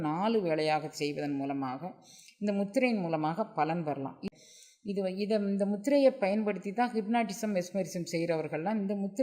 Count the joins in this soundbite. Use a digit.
1